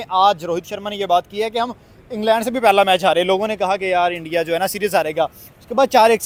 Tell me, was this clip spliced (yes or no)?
no